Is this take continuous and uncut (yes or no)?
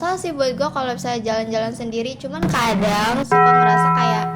no